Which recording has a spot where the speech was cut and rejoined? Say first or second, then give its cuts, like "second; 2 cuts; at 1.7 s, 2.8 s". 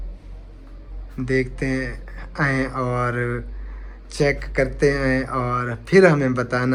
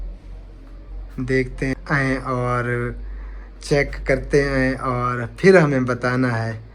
second; 1 cut; at 1.7 s